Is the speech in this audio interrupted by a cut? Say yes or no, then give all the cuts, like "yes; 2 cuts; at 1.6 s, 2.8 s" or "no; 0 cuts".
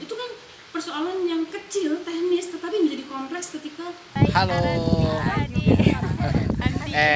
yes; 1 cut; at 4.1 s